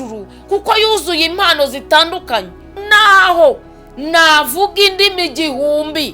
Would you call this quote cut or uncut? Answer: cut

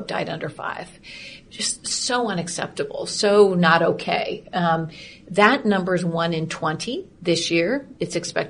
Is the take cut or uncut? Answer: cut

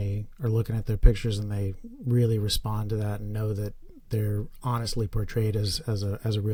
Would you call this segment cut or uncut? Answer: uncut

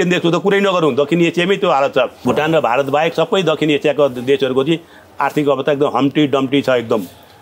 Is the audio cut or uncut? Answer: cut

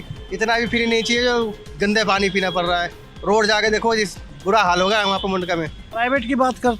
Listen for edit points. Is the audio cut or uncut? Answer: cut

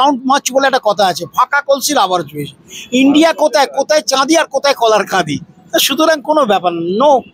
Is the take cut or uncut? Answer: uncut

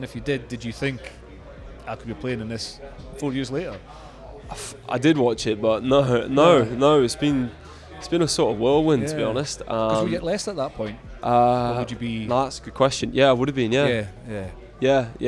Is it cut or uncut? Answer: uncut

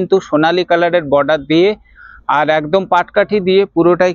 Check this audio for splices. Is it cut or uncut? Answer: uncut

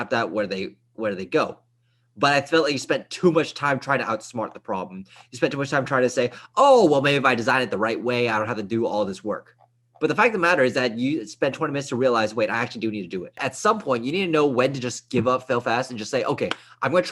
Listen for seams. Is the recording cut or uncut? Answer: cut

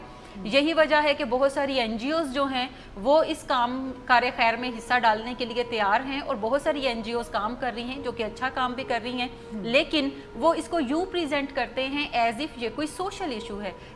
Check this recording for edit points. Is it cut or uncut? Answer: uncut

